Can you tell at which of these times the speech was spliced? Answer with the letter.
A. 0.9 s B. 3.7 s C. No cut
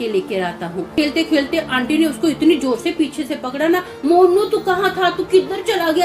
A